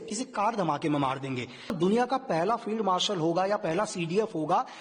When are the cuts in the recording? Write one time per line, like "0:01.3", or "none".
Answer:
0:01.7